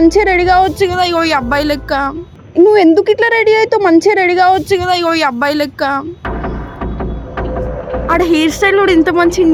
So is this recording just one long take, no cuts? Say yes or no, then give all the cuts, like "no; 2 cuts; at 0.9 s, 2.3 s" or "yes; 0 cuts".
yes; 0 cuts